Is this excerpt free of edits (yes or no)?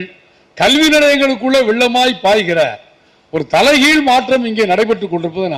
yes